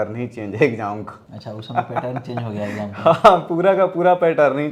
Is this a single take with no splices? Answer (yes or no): yes